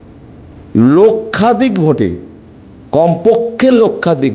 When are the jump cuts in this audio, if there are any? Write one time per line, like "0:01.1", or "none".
none